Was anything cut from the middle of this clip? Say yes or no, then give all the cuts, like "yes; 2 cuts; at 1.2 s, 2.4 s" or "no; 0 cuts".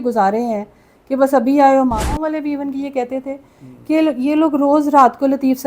yes; 1 cut; at 2.2 s